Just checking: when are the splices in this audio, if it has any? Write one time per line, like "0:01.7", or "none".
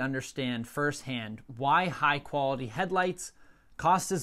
none